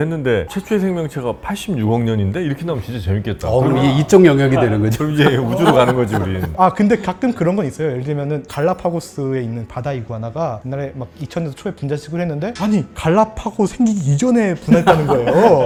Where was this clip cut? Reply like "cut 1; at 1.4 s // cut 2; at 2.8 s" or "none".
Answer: none